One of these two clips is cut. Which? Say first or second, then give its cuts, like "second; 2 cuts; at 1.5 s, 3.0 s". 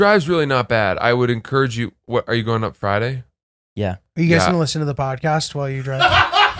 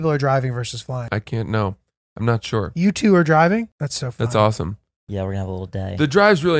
second; 2 cuts; at 1.0 s, 3.8 s